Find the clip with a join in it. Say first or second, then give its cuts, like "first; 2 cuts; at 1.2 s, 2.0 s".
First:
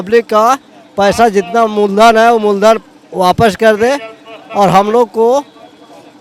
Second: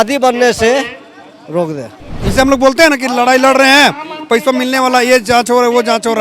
second; 1 cut; at 2.2 s